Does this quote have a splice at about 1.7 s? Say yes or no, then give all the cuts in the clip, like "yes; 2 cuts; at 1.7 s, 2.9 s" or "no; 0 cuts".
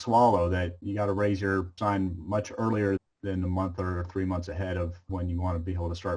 yes; 4 cuts; at 0.8 s, 1.7 s, 3.0 s, 5.0 s